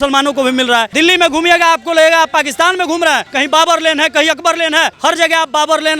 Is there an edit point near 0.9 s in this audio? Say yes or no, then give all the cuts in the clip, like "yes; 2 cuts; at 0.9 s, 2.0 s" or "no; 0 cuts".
yes; 3 cuts; at 0.9 s, 3.3 s, 4.9 s